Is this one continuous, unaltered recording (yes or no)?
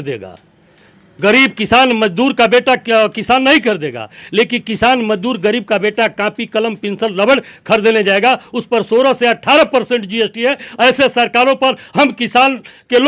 yes